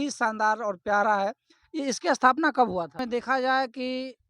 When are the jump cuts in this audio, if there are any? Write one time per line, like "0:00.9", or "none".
0:03.0